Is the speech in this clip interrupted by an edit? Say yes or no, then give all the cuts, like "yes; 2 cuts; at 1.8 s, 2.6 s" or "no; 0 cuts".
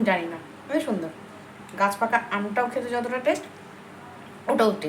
no; 0 cuts